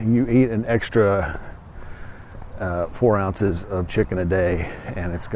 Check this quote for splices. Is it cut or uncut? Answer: uncut